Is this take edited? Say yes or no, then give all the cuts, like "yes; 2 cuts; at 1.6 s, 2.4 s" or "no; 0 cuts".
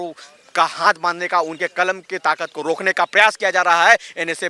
no; 0 cuts